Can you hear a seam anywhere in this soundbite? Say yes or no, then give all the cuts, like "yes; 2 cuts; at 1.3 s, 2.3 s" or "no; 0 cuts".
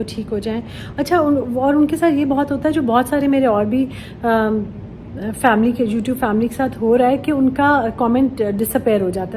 no; 0 cuts